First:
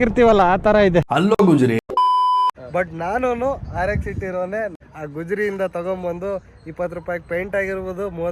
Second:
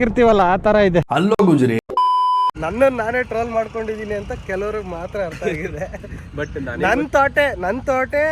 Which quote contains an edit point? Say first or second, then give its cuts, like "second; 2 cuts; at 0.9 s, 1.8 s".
first; 2 cuts; at 2.6 s, 4.7 s